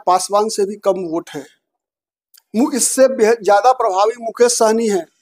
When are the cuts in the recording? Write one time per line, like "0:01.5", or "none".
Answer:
none